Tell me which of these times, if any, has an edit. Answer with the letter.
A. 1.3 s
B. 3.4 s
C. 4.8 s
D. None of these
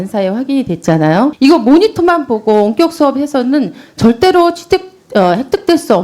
A